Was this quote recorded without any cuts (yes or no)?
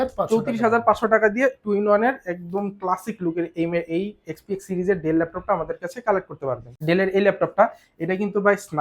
no